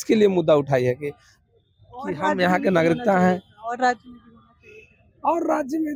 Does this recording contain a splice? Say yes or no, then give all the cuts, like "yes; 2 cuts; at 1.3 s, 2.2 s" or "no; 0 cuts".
no; 0 cuts